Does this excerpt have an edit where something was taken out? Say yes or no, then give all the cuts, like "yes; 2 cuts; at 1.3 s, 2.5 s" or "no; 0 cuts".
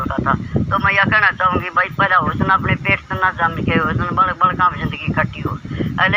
yes; 1 cut; at 2.3 s